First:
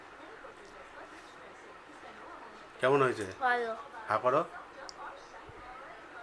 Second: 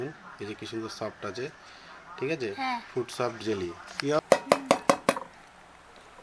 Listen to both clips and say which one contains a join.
second; 1 cut; at 4.2 s

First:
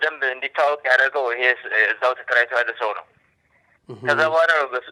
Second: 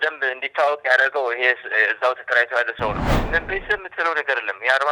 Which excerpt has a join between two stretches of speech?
second; 1 cut; at 3.1 s

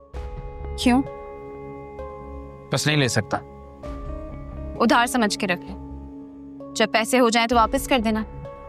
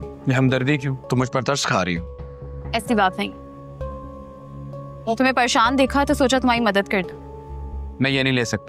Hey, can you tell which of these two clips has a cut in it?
second; 1 cut; at 0.9 s

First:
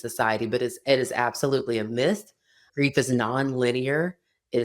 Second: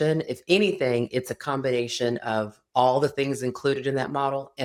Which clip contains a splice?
first; 1 cut; at 2.6 s

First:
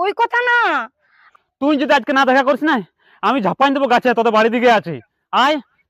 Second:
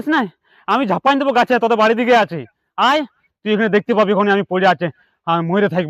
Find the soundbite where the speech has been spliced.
first; 1 cut; at 1.2 s

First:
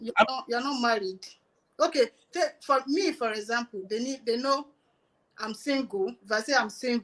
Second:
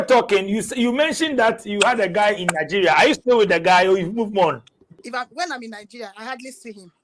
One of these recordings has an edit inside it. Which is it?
second; 1 cut; at 5.0 s

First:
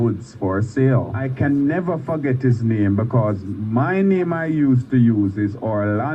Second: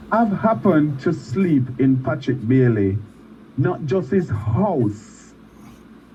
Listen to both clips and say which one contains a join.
first; 1 cut; at 1.2 s

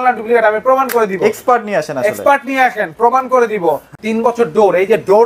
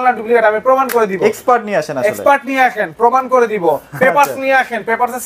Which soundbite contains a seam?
first; 1 cut; at 3.9 s

